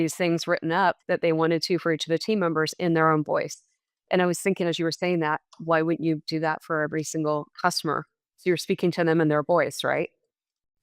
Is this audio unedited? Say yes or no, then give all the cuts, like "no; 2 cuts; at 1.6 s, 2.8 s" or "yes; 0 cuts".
no; 1 cut; at 1.0 s